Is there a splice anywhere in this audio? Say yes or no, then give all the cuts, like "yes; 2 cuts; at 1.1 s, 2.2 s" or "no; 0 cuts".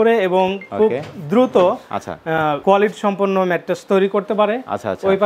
no; 0 cuts